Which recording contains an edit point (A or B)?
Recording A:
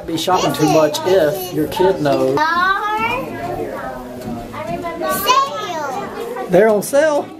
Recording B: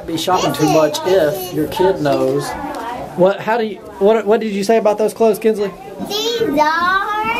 A